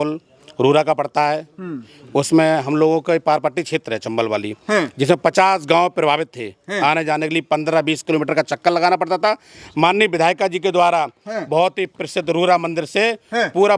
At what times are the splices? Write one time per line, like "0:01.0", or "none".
none